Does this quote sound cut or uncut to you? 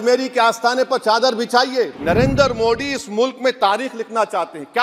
cut